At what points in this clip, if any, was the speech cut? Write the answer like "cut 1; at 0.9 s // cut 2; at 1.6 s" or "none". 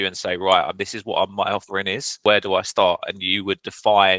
cut 1; at 2.1 s